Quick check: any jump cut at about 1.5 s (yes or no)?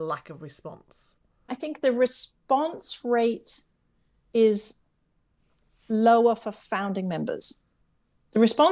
yes